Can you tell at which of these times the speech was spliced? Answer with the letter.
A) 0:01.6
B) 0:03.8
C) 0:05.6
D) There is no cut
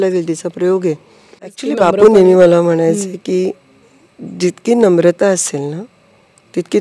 A